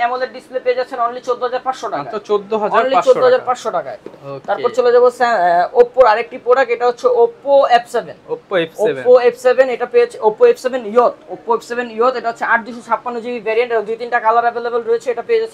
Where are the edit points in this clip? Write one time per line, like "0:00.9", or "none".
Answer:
none